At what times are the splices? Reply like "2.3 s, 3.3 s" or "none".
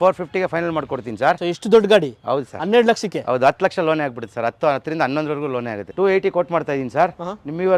1.4 s, 5.8 s

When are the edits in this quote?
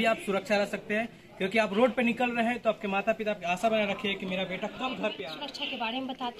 5.4 s

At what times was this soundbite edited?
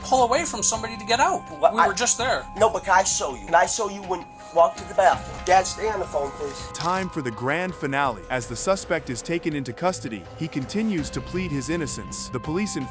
none

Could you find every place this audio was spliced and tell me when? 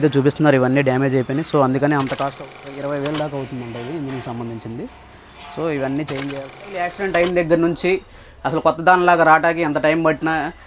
2.4 s, 6.9 s

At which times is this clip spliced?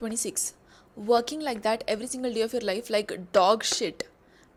none

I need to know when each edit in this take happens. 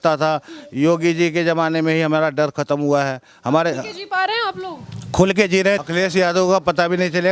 5.8 s

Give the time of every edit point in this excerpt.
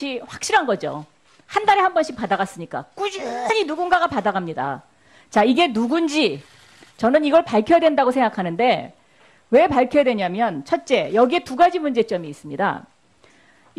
none

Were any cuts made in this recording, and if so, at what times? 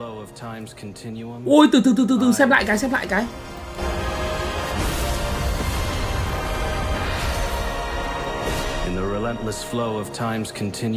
1.4 s

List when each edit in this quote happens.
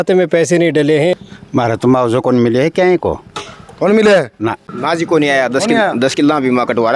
1.3 s, 4.7 s

